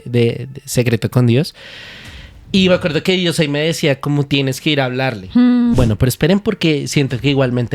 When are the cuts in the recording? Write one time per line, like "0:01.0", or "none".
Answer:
0:05.7